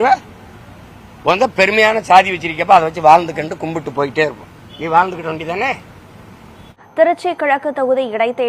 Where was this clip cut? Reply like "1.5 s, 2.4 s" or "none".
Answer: 6.7 s